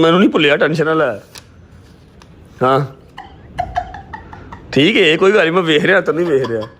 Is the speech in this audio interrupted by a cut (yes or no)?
no